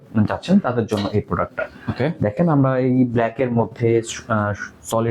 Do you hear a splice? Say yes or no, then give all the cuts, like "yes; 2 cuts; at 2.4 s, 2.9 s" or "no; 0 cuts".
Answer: no; 0 cuts